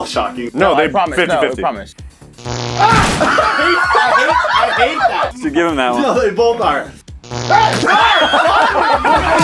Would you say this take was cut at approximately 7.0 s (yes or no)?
yes